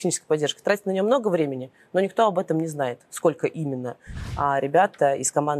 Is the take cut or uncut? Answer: cut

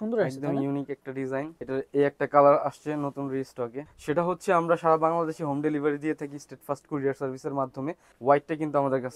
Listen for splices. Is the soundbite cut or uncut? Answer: cut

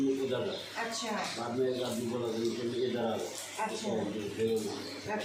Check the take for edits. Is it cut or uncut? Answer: uncut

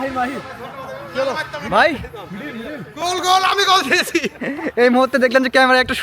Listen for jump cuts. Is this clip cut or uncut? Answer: uncut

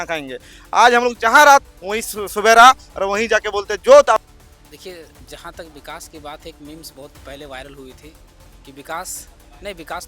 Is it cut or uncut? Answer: cut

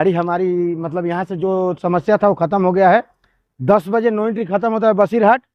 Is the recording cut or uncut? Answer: uncut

